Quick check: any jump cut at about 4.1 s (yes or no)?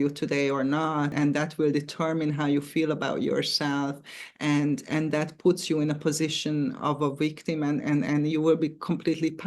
no